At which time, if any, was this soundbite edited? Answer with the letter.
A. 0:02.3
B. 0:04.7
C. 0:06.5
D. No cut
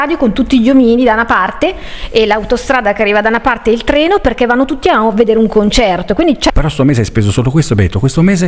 C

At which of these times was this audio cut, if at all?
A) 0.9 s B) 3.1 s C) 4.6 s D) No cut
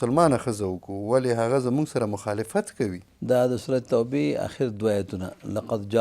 B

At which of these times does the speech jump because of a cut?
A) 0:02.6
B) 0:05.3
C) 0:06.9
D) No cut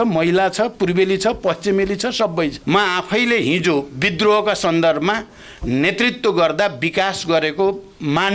A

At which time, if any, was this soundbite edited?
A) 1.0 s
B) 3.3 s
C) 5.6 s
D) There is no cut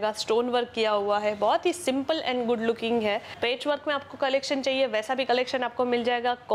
B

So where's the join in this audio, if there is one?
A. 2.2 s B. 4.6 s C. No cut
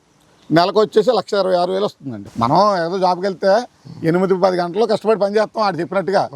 A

